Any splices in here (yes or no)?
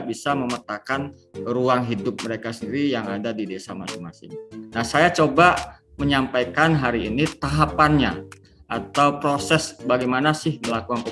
yes